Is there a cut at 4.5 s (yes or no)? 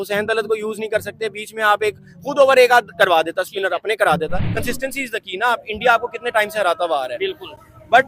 yes